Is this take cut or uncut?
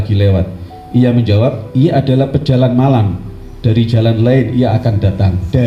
uncut